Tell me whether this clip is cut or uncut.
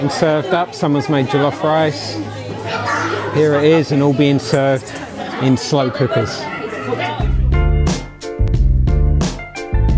cut